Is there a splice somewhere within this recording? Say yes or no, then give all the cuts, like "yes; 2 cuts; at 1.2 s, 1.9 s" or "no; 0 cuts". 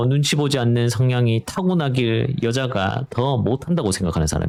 no; 0 cuts